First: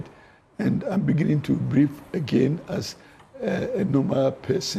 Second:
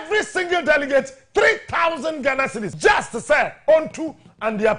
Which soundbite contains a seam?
second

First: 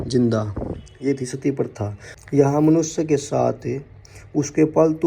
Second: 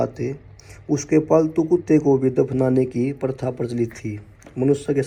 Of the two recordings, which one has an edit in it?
first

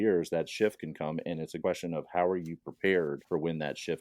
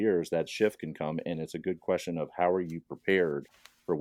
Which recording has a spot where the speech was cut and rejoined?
first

